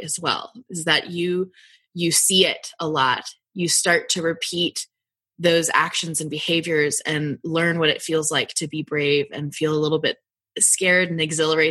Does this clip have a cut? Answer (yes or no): no